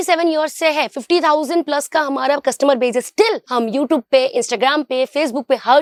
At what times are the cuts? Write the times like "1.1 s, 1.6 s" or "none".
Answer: none